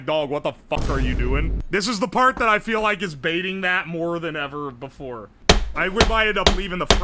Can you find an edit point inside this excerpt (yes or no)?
yes